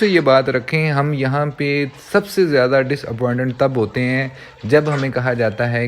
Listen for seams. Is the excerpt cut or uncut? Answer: uncut